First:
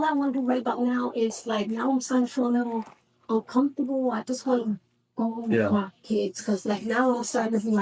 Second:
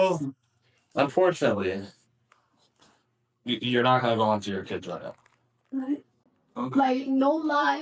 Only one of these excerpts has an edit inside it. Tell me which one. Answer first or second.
second